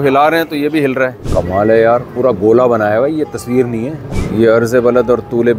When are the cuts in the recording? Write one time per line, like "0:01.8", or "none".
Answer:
0:01.2
0:04.1